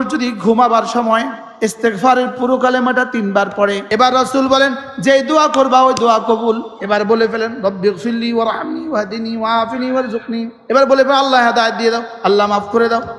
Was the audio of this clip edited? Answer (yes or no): yes